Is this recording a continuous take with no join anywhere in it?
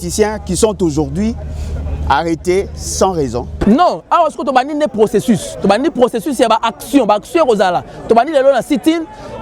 no; 1 cut; at 3.6 s

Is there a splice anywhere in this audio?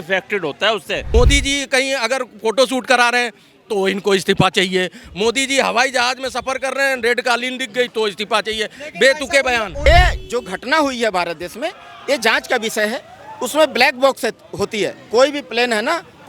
yes; 2 cuts; at 1.1 s, 9.9 s

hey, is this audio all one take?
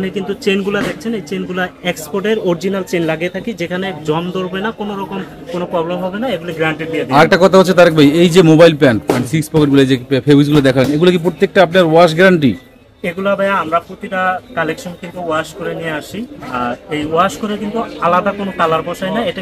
yes; 0 cuts

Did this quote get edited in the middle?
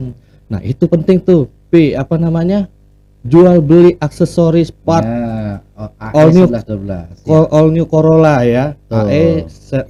no; 0 cuts

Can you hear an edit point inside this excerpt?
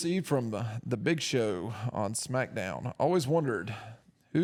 no; 0 cuts

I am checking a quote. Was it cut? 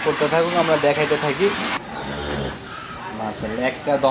yes; 1 cut; at 1.7 s

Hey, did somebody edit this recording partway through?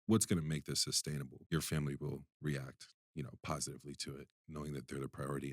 yes; 1 cut; at 1.4 s

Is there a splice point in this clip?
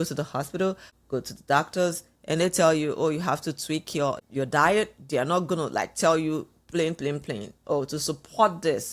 yes; 2 cuts; at 0.9 s, 4.2 s

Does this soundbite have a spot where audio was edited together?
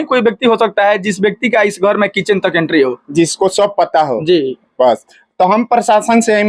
no; 0 cuts

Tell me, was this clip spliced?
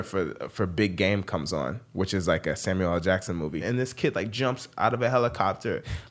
yes; 1 cut; at 3.6 s

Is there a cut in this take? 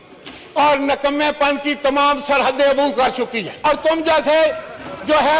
yes; 1 cut; at 3.6 s

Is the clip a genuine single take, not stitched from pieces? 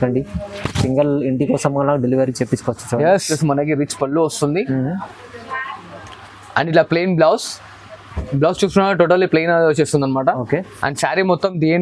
no; 1 cut; at 3.3 s

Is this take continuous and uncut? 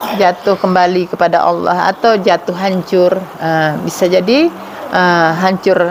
yes; 0 cuts

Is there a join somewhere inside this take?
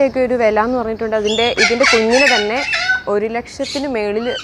no; 0 cuts

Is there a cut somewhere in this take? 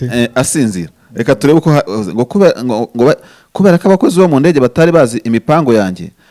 no; 0 cuts

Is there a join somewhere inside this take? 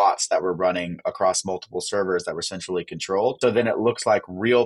yes; 1 cut; at 3.4 s

